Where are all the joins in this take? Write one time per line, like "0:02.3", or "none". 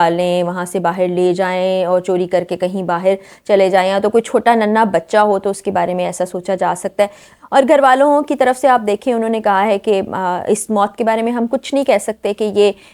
0:07.3

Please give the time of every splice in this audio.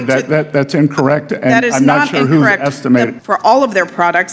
0:03.2

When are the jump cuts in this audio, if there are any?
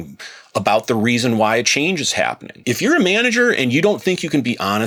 none

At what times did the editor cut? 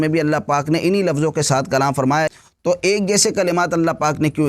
0:02.3

